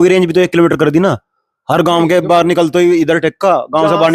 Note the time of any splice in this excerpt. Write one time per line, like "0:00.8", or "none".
none